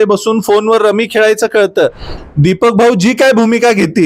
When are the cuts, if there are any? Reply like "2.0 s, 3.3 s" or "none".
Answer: 2.1 s